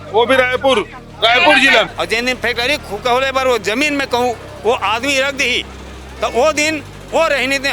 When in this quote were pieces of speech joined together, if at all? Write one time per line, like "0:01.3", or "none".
0:01.9